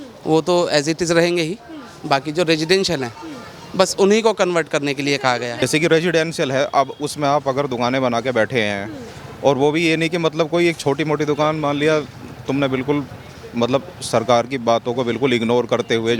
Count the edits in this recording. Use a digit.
1